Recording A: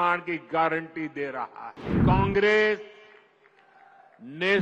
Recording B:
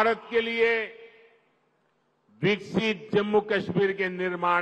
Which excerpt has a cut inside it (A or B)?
A